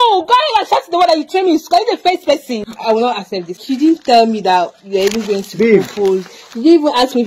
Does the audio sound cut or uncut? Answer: cut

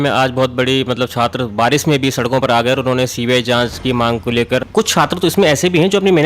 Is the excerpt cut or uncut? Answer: cut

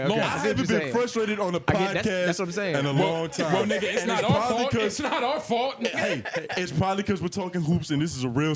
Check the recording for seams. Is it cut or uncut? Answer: uncut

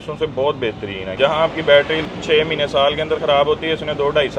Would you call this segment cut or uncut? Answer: cut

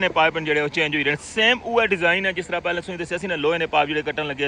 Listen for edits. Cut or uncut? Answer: uncut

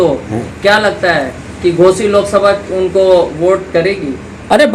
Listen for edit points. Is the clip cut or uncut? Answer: uncut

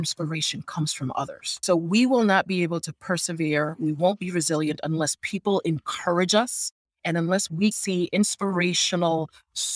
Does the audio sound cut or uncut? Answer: cut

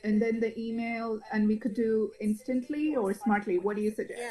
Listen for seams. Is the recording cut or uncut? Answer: uncut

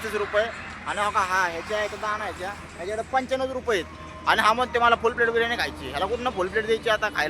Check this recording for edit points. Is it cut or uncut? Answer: cut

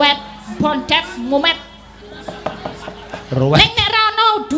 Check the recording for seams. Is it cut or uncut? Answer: uncut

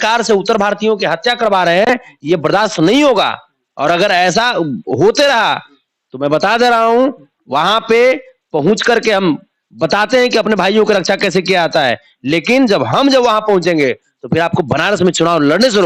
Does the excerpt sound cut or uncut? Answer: uncut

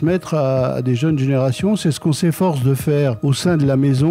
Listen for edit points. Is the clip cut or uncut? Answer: uncut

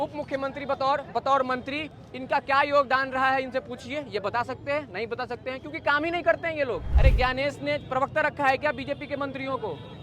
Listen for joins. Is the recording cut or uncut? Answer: cut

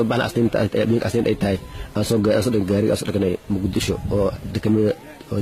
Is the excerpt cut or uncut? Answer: cut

